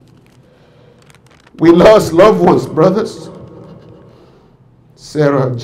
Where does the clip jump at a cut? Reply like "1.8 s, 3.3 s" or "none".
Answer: 4.2 s